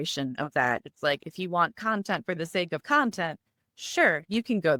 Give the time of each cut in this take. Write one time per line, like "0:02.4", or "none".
none